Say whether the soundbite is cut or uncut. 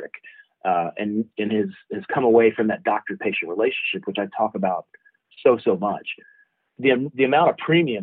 cut